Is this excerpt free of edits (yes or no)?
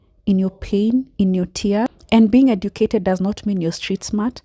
no